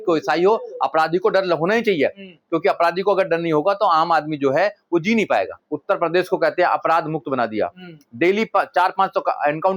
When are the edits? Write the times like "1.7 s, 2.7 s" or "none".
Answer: 5.5 s